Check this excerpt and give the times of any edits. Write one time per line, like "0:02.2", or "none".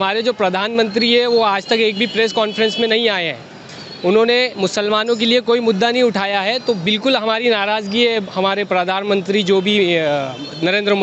none